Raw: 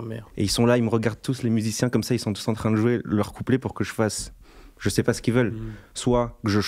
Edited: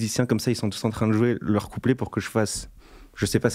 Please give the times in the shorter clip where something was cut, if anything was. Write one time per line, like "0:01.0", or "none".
none